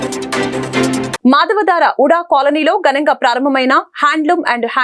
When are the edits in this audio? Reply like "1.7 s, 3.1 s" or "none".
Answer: 1.1 s